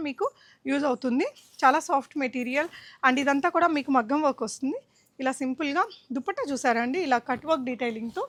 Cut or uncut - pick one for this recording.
uncut